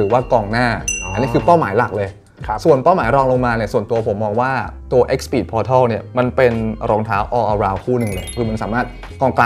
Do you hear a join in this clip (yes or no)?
no